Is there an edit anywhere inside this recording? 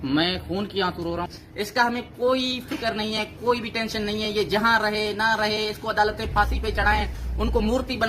yes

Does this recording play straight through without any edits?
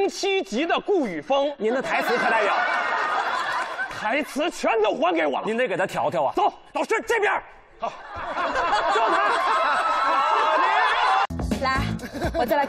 no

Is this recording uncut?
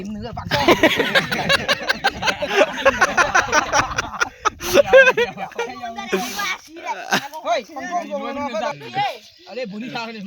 no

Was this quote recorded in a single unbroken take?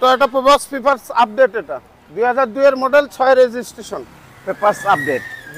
yes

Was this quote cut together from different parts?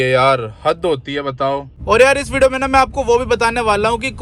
yes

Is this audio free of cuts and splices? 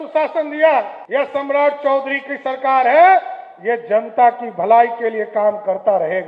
no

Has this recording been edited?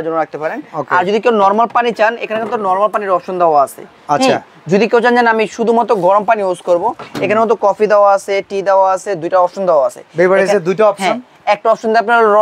no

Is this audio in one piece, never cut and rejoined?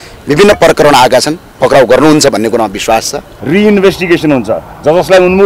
no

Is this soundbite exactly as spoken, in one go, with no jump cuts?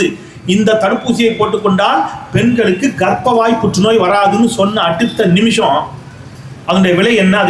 yes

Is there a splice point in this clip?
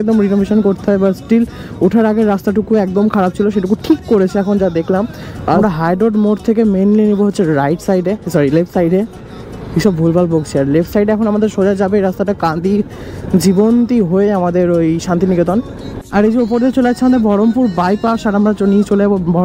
yes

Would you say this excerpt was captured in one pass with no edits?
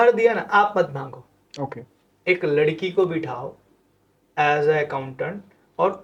yes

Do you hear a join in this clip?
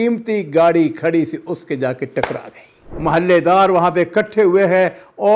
yes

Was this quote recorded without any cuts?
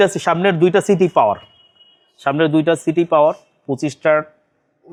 yes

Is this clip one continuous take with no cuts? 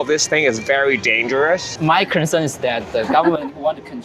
no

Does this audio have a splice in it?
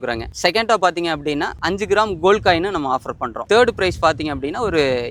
no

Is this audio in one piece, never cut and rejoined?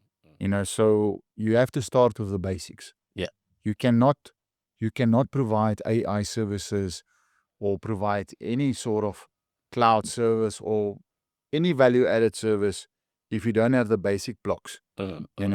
yes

